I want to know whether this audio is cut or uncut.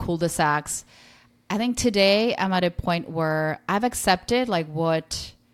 uncut